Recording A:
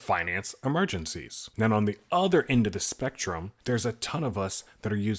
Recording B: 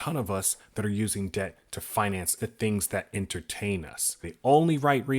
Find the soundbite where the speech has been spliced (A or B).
B